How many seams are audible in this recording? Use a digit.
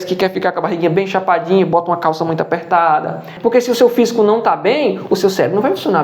1